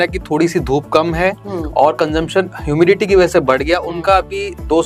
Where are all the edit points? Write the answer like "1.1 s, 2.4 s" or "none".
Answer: none